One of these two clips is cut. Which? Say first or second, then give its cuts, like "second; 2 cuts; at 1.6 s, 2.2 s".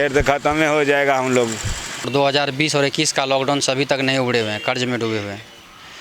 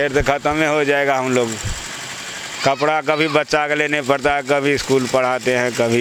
first; 1 cut; at 2.1 s